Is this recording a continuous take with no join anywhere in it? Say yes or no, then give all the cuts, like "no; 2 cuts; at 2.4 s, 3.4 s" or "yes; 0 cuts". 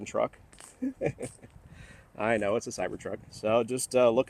no; 1 cut; at 3.3 s